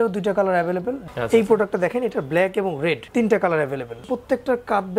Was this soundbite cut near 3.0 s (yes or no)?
yes